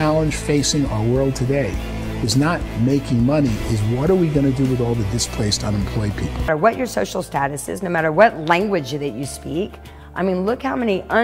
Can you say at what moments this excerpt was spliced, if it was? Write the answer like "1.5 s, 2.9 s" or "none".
6.5 s